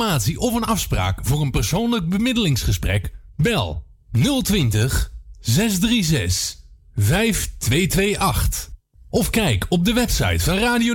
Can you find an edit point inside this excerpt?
no; 0 cuts

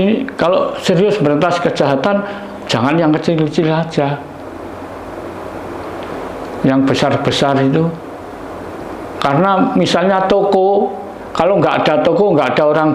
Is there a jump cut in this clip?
no; 0 cuts

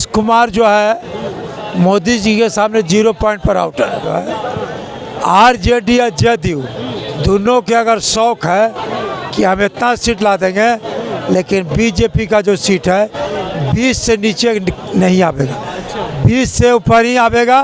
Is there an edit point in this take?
yes; 1 cut; at 4.1 s

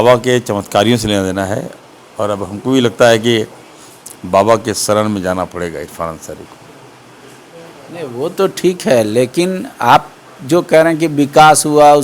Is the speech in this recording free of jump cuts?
yes; 0 cuts

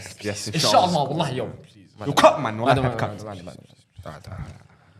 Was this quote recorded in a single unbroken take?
yes; 0 cuts

